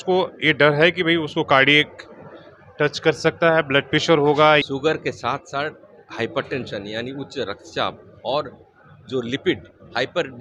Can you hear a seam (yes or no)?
yes